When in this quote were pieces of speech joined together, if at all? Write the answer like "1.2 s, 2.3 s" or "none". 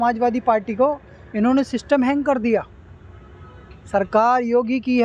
none